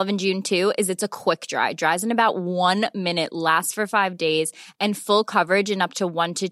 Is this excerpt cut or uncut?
uncut